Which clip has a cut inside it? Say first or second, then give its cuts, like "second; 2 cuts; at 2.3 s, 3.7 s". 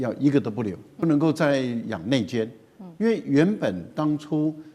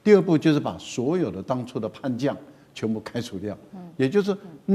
first; 1 cut; at 1.0 s